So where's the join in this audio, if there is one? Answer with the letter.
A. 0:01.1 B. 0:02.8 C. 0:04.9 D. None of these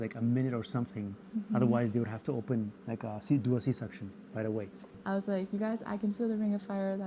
C